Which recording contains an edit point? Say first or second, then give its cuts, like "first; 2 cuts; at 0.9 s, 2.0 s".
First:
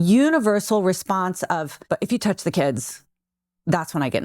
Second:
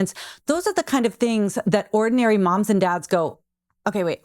first; 1 cut; at 1.7 s